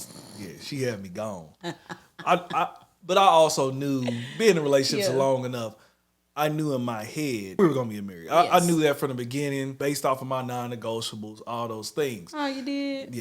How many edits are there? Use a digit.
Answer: 2